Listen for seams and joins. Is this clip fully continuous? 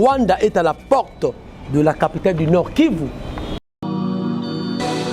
no; 1 cut; at 3.6 s

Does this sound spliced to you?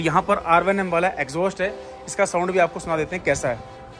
no; 0 cuts

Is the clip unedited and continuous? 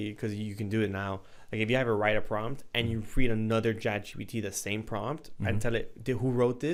yes; 0 cuts

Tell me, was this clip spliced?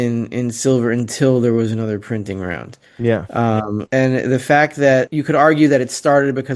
yes; 2 cuts; at 3.8 s, 5.1 s

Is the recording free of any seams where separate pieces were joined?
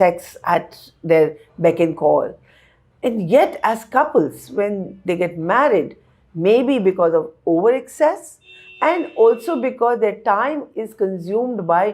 yes; 0 cuts

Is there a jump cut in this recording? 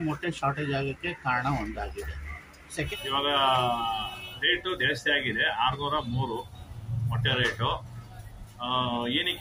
yes; 1 cut; at 2.9 s

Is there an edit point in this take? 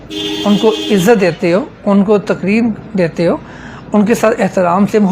no; 0 cuts

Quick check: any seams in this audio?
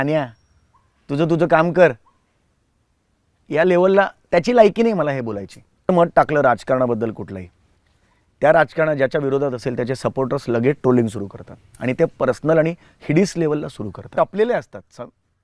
yes; 2 cuts; at 5.9 s, 14.1 s

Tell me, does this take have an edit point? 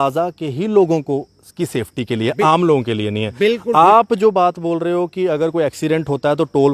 no; 0 cuts

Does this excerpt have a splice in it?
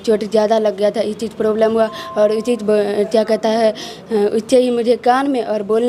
no; 0 cuts

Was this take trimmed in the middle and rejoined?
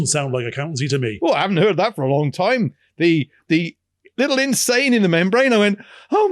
yes; 1 cut; at 1.1 s

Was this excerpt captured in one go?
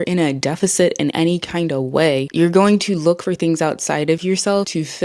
yes; 0 cuts

